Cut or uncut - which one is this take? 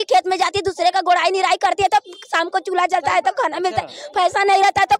uncut